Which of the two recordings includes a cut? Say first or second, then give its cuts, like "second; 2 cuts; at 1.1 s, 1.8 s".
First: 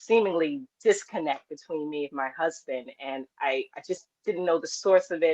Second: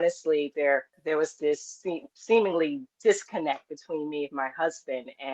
second; 1 cut; at 0.9 s